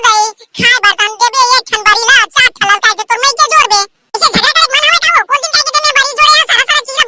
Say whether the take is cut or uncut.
uncut